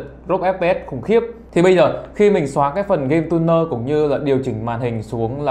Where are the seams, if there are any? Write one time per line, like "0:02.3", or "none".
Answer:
0:01.4